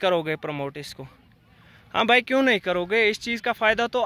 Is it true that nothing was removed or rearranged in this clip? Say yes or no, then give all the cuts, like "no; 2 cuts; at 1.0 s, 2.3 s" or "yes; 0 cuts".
yes; 0 cuts